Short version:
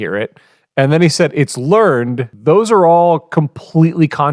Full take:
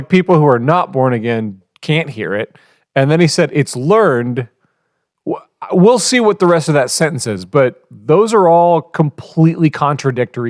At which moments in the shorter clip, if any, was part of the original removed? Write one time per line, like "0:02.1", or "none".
0:02.3